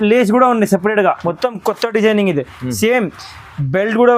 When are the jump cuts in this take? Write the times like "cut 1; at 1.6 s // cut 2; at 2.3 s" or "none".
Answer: cut 1; at 1.2 s